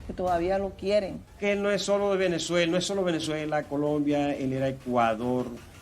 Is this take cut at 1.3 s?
yes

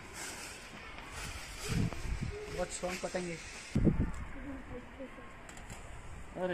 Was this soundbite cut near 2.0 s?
no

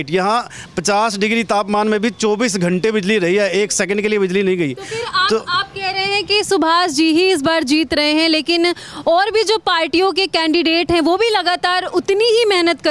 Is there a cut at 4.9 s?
no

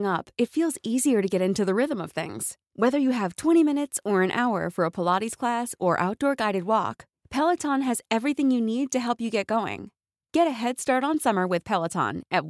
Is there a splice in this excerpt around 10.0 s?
no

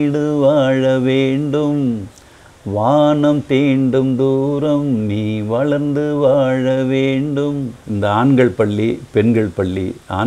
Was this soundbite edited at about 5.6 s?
no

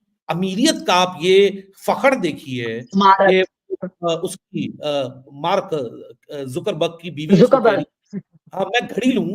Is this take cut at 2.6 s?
no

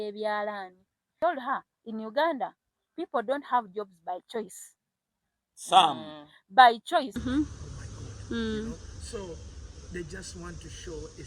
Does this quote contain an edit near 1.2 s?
yes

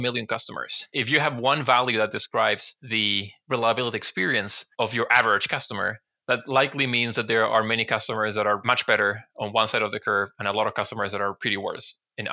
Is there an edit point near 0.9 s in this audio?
yes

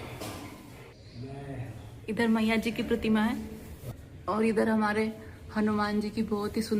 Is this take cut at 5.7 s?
no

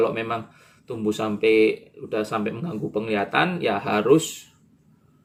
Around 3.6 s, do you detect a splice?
no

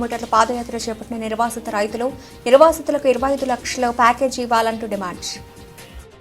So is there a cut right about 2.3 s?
no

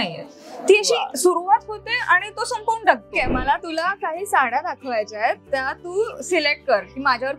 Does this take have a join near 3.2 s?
yes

